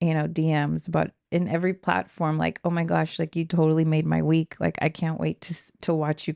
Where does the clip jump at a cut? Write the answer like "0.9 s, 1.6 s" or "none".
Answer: none